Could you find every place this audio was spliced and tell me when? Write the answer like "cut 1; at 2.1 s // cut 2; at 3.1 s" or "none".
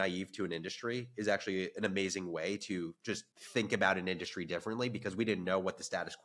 cut 1; at 3.3 s